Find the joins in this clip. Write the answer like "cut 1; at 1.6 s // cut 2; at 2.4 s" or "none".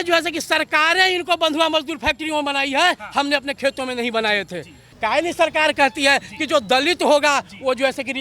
cut 1; at 4.9 s